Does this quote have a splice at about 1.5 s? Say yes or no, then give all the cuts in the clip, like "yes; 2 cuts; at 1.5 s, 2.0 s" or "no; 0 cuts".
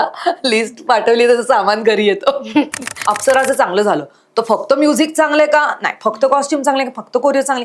no; 1 cut; at 3.1 s